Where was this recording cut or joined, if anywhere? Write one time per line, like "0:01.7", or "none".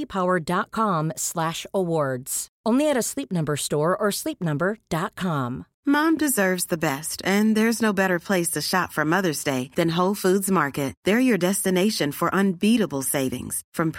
0:05.7